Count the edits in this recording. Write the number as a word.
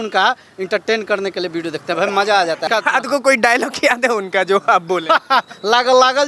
one